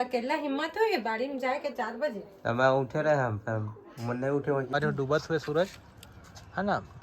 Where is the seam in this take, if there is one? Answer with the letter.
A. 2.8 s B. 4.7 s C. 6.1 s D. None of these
B